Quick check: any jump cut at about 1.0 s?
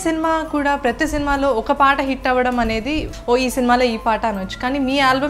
no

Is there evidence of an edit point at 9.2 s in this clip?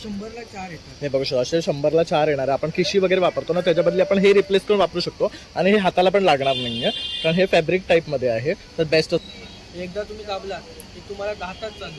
yes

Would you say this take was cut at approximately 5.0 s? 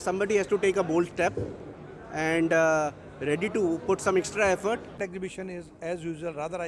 yes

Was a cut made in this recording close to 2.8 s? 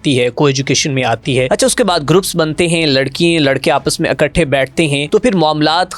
no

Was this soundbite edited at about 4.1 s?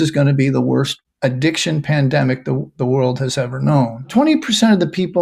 yes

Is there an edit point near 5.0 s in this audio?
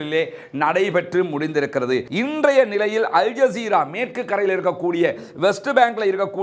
no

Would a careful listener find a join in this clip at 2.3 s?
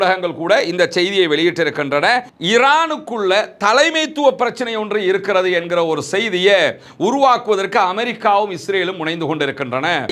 yes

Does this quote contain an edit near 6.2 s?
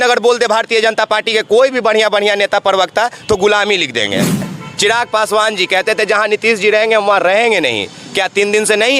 no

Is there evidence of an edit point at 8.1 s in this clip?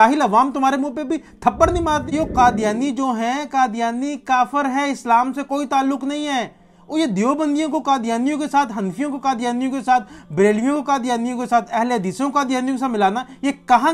no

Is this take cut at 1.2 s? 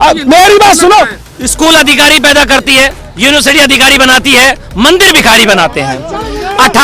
yes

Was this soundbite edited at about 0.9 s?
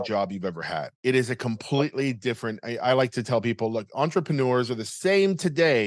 yes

